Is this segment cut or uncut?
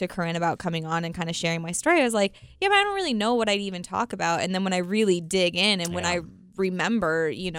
uncut